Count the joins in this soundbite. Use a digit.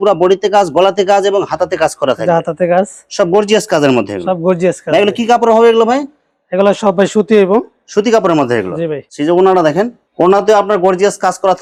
0